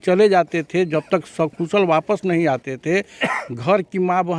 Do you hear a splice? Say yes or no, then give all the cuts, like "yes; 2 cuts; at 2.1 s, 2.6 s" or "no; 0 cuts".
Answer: no; 0 cuts